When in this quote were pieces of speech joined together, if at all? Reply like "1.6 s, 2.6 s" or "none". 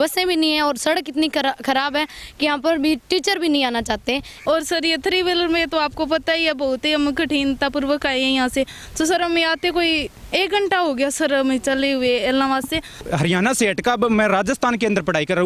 4.3 s, 13.0 s